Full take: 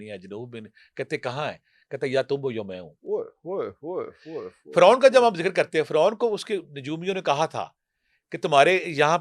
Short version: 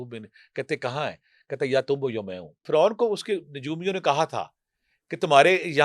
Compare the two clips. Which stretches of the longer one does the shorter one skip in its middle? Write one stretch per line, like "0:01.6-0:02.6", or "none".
0:03.1-0:05.9